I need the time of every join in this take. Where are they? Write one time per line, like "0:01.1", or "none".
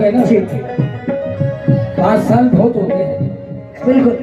none

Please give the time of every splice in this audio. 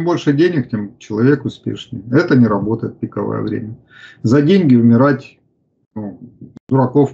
none

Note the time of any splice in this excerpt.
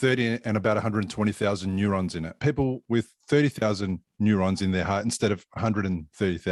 0:02.4

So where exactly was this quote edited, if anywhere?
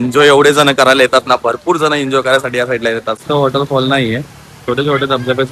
0:03.2

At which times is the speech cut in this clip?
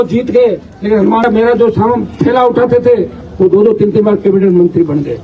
0:01.2

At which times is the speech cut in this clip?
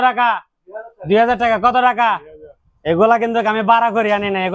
none

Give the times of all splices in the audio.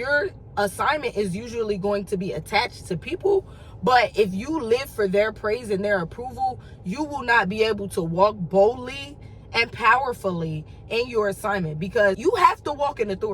0:12.2

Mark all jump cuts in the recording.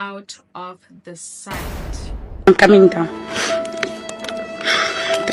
none

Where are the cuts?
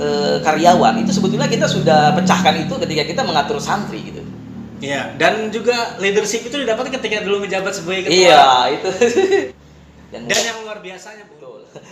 0:09.6

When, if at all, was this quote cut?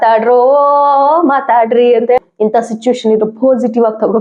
0:02.2

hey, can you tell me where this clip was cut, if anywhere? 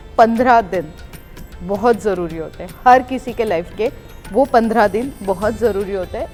none

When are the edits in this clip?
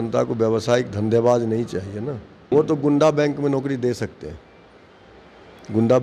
0:02.4

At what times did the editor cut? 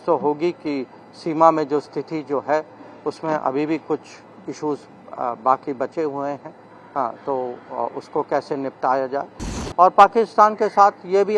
none

